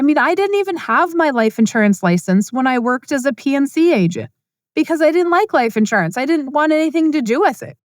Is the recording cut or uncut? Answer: cut